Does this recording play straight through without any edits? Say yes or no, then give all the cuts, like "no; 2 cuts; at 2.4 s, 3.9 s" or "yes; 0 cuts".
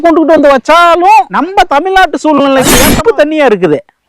no; 2 cuts; at 1.4 s, 2.9 s